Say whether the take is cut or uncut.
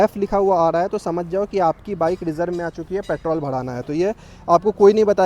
uncut